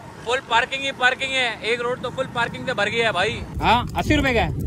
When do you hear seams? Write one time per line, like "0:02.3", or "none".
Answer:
0:03.5